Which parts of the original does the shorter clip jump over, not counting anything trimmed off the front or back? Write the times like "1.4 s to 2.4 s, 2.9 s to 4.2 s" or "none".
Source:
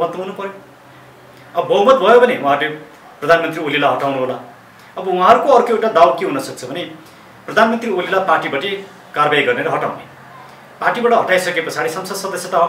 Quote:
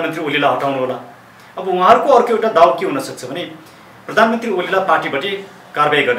none